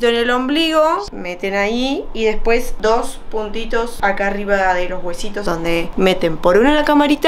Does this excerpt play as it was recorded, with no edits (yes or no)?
no